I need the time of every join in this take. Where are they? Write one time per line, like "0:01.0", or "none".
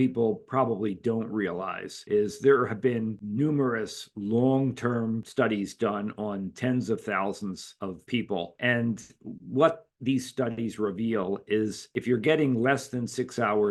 none